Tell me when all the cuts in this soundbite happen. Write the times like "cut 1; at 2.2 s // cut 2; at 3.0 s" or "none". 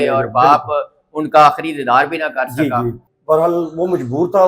cut 1; at 3.1 s